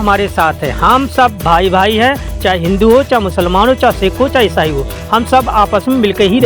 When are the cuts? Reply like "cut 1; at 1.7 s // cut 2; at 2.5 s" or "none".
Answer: none